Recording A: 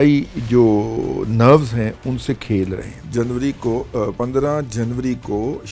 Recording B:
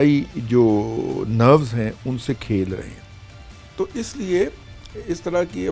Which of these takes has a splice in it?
A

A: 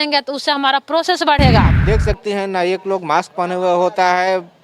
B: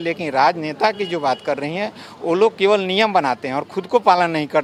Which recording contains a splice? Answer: A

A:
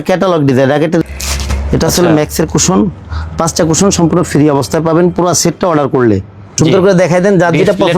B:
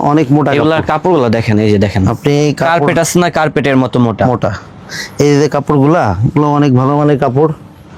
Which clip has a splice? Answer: A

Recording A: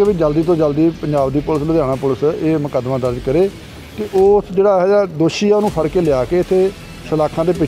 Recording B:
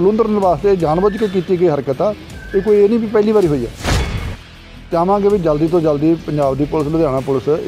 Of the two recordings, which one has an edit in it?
B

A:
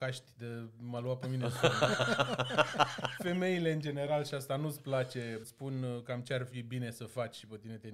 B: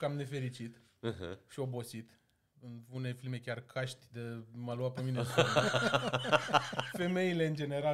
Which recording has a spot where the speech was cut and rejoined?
A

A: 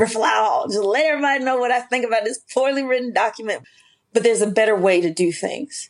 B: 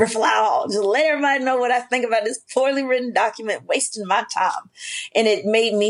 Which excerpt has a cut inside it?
A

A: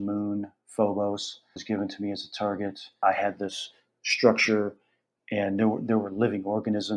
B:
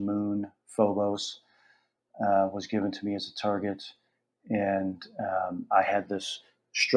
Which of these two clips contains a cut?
A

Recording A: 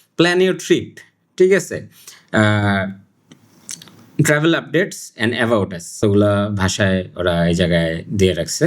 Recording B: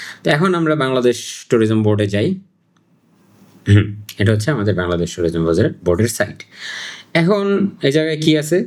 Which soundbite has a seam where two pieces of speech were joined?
A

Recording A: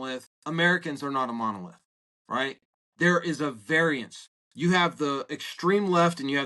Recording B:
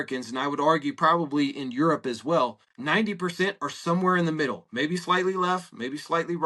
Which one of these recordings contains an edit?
B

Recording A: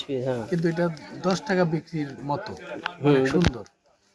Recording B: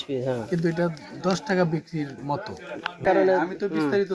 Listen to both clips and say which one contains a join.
B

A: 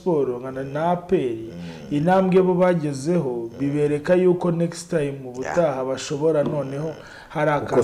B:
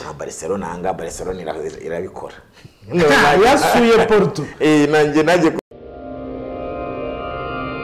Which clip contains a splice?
B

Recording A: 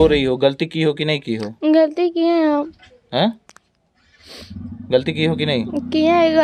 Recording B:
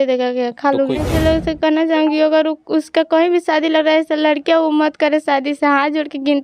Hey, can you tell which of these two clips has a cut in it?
B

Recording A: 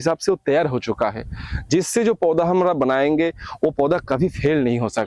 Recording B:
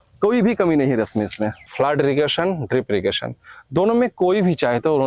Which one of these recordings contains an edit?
B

